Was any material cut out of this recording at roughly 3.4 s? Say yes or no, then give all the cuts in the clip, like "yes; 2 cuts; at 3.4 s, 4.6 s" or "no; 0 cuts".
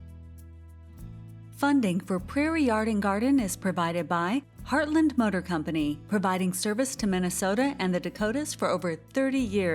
no; 1 cut; at 1.5 s